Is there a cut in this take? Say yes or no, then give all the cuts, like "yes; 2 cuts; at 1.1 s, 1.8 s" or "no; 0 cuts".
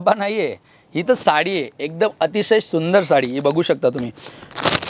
no; 0 cuts